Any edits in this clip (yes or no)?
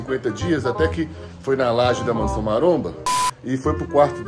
yes